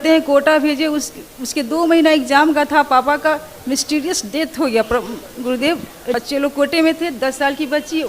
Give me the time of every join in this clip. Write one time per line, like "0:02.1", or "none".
0:06.1

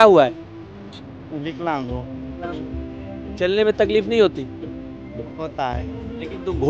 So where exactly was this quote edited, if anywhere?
none

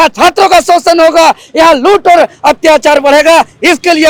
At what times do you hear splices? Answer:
none

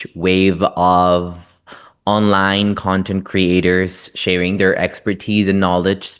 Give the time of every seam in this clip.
none

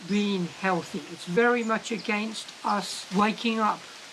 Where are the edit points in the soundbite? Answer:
0:01.0
0:03.0

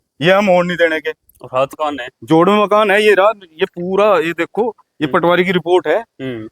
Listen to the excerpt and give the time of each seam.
0:01.8

